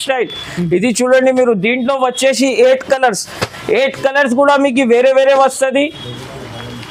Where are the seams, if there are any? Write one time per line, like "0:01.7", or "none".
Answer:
none